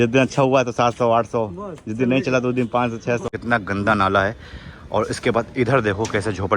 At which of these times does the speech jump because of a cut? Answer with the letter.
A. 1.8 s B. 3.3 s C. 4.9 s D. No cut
B